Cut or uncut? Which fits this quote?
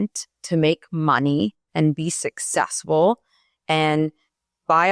uncut